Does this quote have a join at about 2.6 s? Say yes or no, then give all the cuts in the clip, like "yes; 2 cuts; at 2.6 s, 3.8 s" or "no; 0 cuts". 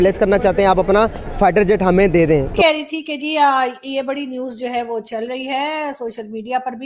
yes; 1 cut; at 2.6 s